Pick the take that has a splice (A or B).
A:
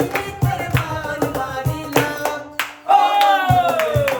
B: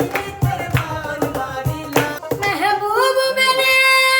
B